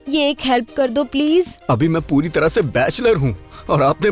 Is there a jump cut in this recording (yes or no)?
yes